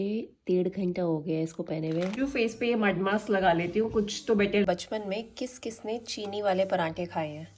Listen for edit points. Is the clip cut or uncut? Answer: cut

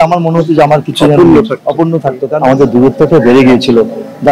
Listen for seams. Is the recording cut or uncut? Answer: cut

